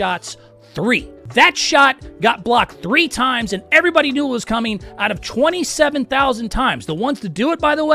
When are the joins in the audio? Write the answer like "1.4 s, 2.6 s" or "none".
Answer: 1.2 s